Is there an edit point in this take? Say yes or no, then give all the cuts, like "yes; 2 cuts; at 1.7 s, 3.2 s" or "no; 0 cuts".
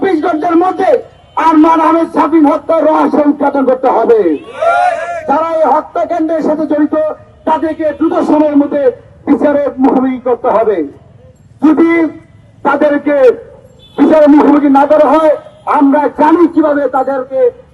no; 0 cuts